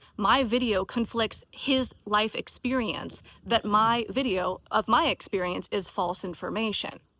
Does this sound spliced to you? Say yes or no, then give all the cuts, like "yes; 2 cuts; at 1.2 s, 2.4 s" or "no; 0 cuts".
no; 0 cuts